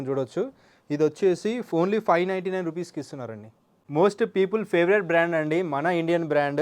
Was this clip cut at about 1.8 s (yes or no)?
no